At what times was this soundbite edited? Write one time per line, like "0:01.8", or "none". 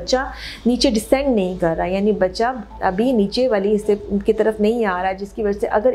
none